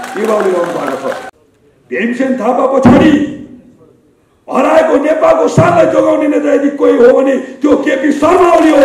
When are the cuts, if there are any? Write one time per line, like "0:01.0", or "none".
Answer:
0:01.3